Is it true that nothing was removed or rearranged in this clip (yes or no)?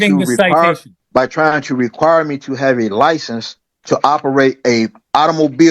no